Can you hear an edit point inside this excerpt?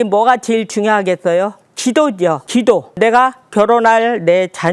yes; 1 cut; at 2.9 s

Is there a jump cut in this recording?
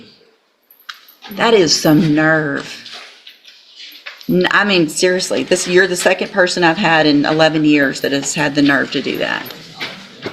no; 0 cuts

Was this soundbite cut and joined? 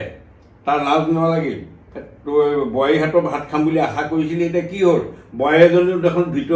no; 0 cuts

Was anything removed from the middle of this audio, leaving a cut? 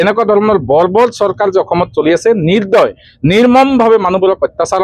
no; 0 cuts

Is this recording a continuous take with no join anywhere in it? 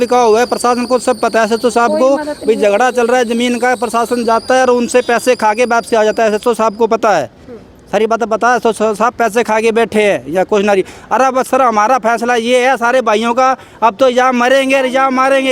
yes; 0 cuts

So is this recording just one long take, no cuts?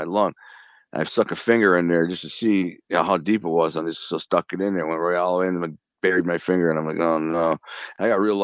yes; 0 cuts

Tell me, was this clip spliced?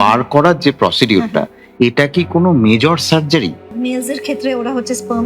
yes; 2 cuts; at 1.6 s, 3.7 s

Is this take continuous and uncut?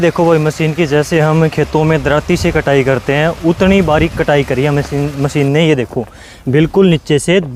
yes; 0 cuts

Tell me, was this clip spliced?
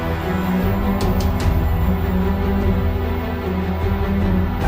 no; 0 cuts

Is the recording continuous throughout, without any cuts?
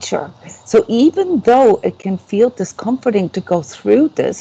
yes; 0 cuts

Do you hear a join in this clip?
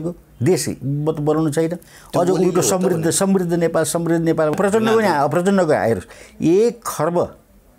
yes; 1 cut; at 4.5 s

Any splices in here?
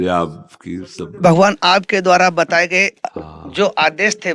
no; 0 cuts

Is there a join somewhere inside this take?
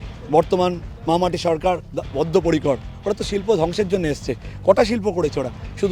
no; 0 cuts

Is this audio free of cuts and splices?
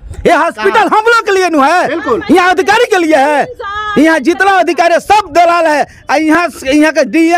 yes; 0 cuts

